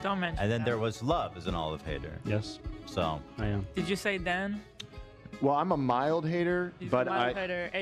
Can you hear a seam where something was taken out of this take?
no; 0 cuts

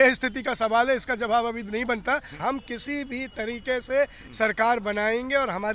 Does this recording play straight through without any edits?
no; 1 cut; at 2.3 s

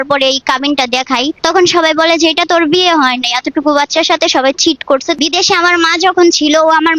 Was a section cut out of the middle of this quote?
yes; 2 cuts; at 1.4 s, 5.2 s

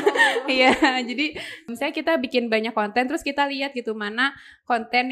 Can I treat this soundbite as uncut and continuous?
no; 1 cut; at 1.7 s

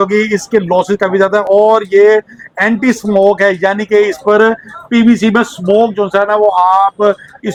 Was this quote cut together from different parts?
no; 0 cuts

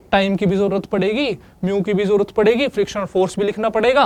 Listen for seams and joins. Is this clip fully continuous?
yes; 0 cuts

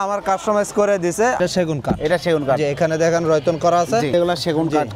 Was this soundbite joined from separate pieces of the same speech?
yes; 2 cuts; at 1.4 s, 4.1 s

